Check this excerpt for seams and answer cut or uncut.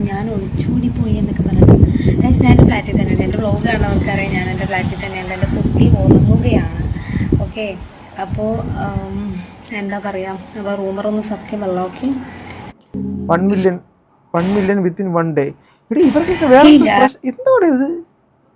uncut